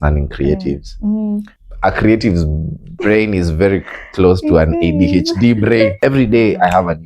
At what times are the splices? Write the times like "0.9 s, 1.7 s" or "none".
1.5 s, 6.0 s